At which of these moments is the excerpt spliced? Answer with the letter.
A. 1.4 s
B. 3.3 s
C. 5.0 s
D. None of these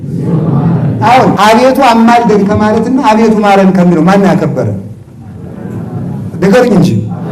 A